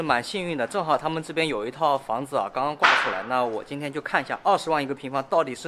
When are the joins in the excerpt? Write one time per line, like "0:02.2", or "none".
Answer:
none

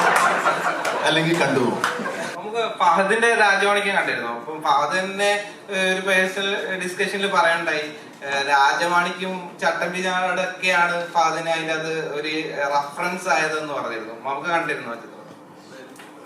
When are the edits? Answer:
0:02.3

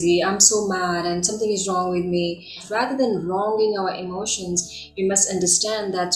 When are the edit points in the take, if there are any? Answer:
0:02.6

